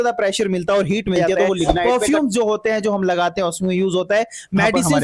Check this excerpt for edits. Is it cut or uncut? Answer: cut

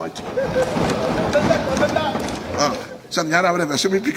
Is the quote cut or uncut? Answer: cut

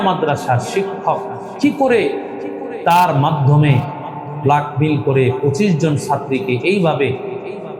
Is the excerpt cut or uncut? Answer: cut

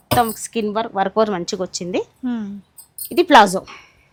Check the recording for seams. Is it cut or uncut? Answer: uncut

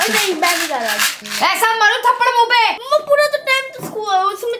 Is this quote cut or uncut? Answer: cut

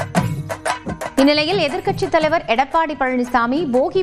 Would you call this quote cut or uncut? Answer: cut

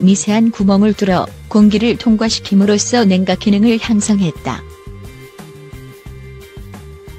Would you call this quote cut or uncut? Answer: cut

